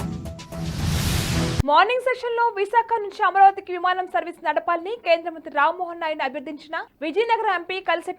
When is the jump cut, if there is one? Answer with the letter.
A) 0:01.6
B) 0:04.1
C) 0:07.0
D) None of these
A